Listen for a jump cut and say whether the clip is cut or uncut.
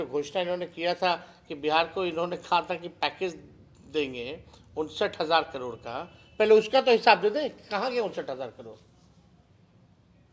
uncut